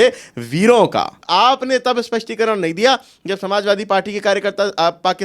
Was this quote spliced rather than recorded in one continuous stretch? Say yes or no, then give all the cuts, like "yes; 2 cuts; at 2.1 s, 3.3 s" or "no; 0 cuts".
yes; 1 cut; at 1.2 s